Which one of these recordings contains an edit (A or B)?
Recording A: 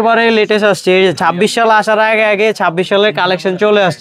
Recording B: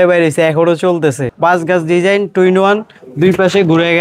B